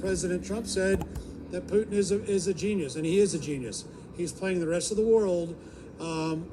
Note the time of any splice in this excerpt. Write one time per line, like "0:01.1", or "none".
0:01.1